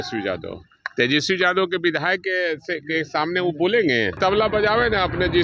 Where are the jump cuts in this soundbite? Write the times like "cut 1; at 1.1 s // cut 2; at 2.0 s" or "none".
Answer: cut 1; at 4.1 s